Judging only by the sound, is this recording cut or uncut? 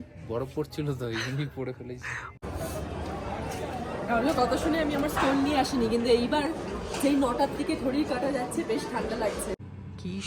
cut